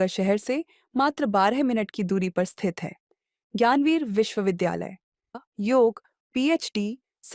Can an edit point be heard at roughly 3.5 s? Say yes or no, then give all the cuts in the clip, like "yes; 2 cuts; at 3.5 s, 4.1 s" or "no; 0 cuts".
no; 1 cut; at 5.3 s